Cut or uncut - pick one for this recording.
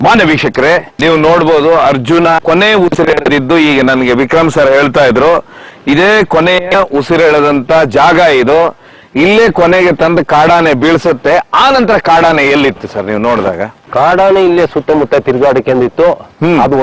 cut